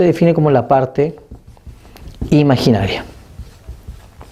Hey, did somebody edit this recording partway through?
no; 0 cuts

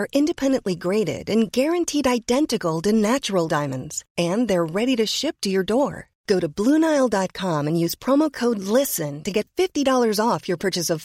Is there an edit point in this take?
no; 0 cuts

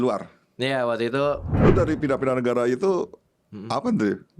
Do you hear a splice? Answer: yes; 1 cut; at 1.5 s

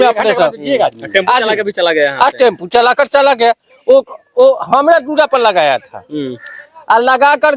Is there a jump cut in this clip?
no; 0 cuts

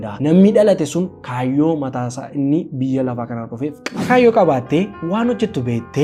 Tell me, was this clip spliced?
yes; 1 cut; at 3.9 s

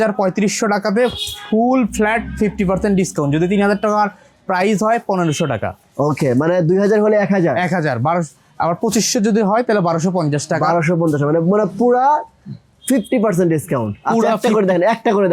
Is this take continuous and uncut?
yes; 0 cuts

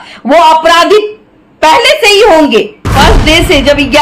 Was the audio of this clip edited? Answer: yes; 1 cut; at 2.9 s

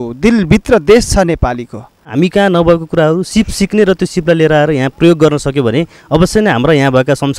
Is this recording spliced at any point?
yes; 1 cut; at 2.1 s

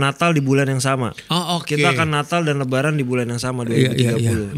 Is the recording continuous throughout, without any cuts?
no; 1 cut; at 1.2 s

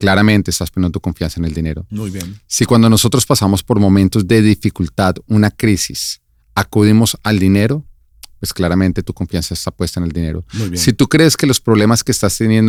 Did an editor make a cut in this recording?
no; 0 cuts

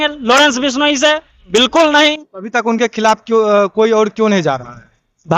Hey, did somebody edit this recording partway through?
no; 0 cuts

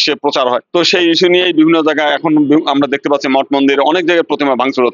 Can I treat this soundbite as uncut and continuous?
yes; 0 cuts

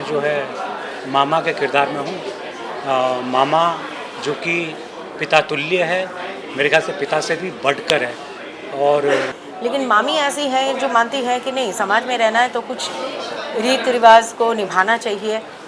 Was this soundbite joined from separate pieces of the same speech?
yes; 1 cut; at 9.4 s

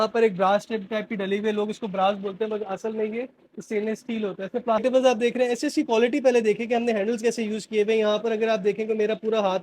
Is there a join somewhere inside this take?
yes; 1 cut; at 4.8 s

